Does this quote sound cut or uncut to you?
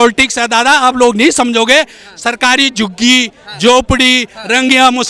uncut